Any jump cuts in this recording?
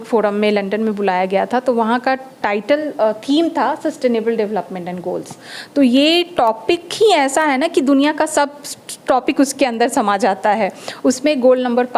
no; 0 cuts

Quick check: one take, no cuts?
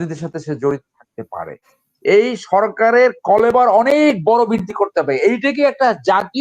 no; 1 cut; at 1.6 s

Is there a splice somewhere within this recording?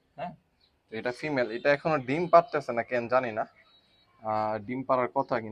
no; 0 cuts

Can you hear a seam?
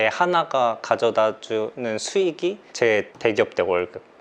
no; 0 cuts

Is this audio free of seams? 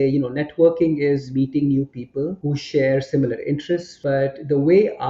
no; 3 cuts; at 1.3 s, 2.4 s, 3.9 s

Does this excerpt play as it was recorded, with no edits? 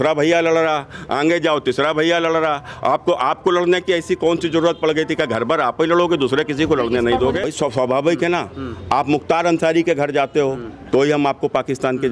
no; 1 cut; at 7.4 s

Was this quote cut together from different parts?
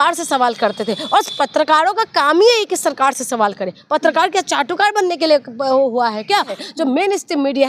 yes; 1 cut; at 6.6 s

